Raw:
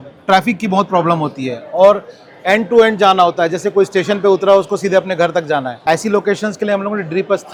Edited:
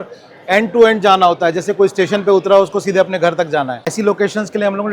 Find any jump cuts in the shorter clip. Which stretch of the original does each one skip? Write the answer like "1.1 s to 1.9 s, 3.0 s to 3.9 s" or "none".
5.8 s to 5.9 s